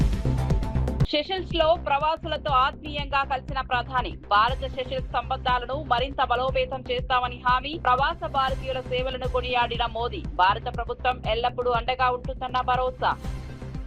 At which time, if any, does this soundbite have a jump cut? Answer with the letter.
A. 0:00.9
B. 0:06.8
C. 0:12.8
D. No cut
A